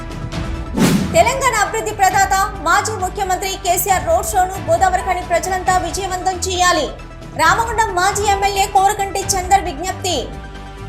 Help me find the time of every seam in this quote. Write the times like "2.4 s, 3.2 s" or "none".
1.0 s